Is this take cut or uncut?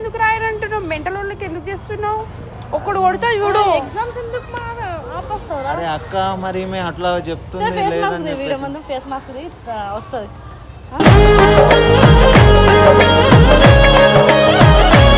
uncut